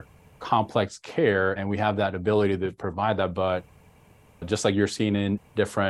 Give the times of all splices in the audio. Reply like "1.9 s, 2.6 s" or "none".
1.6 s